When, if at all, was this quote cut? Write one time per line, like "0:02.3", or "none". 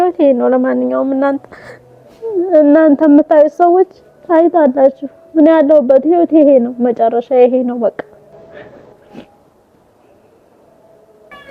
none